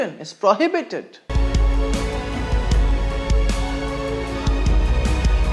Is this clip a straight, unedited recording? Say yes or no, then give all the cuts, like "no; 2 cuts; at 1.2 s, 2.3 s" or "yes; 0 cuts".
no; 1 cut; at 1.3 s